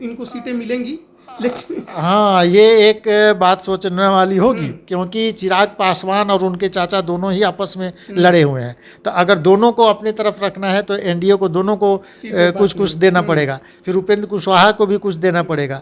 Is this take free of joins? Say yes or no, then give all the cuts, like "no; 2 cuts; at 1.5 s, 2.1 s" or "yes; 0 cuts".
yes; 0 cuts